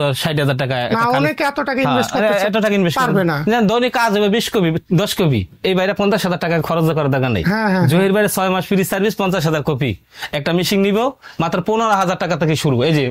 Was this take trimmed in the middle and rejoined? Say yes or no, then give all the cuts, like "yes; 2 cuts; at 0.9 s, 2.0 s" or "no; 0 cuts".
no; 0 cuts